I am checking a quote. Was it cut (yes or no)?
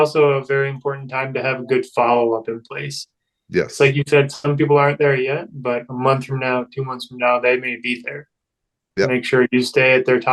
no